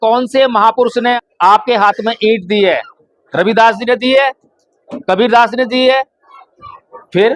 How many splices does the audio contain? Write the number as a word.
one